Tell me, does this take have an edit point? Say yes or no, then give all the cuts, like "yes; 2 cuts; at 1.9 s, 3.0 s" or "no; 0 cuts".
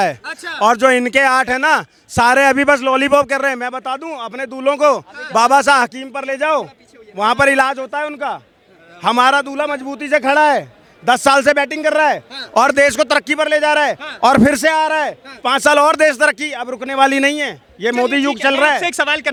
no; 0 cuts